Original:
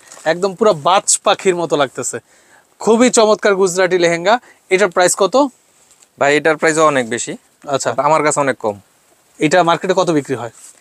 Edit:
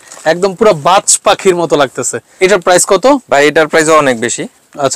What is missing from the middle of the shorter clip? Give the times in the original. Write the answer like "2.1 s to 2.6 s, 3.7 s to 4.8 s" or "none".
2.2 s to 4.5 s, 5.5 s to 6.1 s